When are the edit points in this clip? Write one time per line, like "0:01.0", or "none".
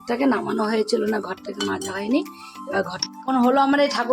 0:03.0